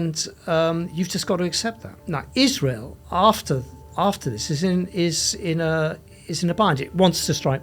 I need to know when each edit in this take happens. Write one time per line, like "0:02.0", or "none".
0:01.9